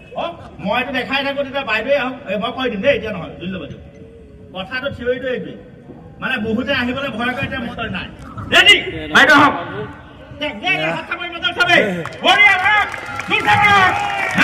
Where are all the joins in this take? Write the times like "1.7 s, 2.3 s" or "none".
7.7 s